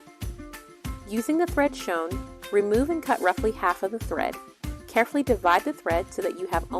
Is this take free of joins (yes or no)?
no